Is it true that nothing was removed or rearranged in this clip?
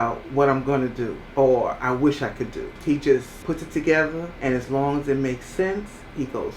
no; 4 cuts; at 1.2 s, 2.7 s, 3.3 s, 4.3 s

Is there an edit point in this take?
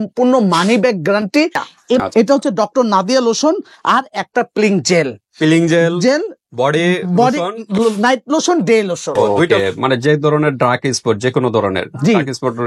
yes; 2 cuts; at 2.0 s, 9.5 s

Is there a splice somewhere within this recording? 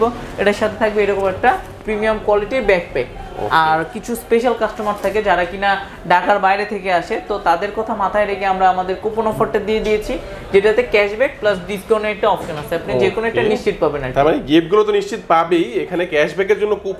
no; 0 cuts

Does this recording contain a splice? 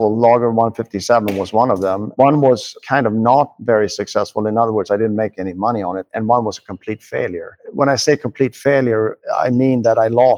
no; 0 cuts

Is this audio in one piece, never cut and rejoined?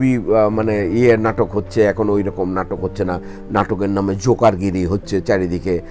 yes; 0 cuts

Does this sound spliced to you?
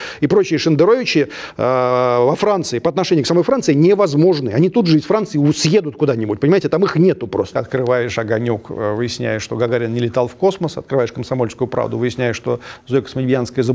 yes; 1 cut; at 7.5 s

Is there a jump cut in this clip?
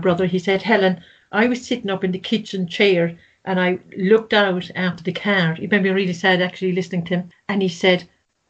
yes; 1 cut; at 7.4 s

